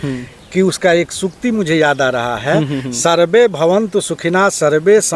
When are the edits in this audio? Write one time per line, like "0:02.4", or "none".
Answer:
none